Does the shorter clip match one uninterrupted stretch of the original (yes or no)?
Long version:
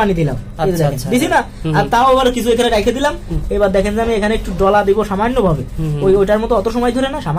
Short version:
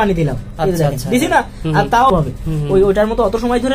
no